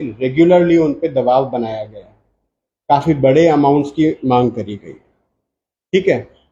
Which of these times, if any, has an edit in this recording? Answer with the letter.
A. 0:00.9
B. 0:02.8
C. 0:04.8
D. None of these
D